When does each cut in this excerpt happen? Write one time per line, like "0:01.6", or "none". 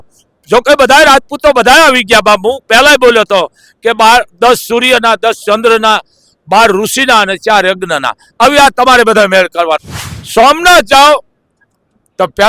0:09.9